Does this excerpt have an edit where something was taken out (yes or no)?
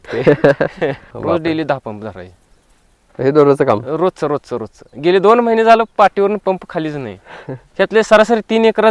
yes